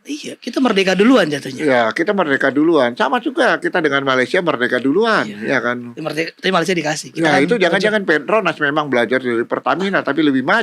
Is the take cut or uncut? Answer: uncut